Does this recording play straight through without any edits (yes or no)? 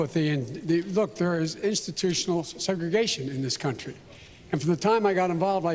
no